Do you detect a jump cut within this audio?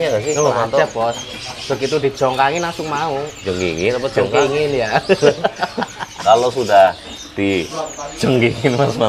yes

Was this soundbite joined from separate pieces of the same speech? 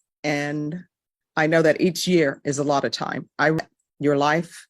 yes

